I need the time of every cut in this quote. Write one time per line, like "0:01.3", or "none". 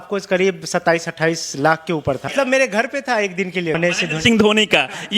0:02.3
0:03.8